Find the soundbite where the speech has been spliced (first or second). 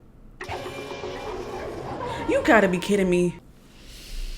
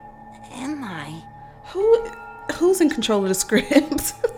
first